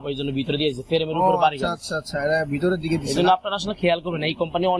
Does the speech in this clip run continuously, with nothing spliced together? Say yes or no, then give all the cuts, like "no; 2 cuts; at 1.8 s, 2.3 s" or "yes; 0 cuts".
yes; 0 cuts